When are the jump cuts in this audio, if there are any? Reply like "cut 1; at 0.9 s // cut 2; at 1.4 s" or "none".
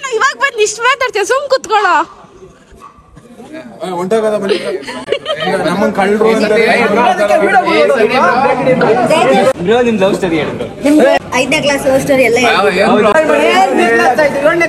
cut 1; at 9.5 s // cut 2; at 11.2 s // cut 3; at 13.1 s